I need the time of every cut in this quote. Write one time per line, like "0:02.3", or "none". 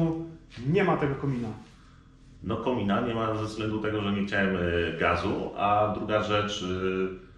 none